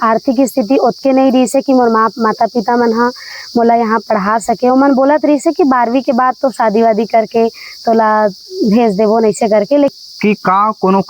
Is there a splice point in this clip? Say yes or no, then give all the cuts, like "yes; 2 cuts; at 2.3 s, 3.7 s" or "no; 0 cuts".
yes; 1 cut; at 9.9 s